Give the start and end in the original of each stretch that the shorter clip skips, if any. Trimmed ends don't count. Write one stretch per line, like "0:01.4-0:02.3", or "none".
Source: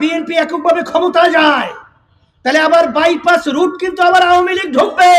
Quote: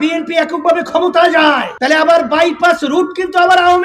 0:01.7-0:02.3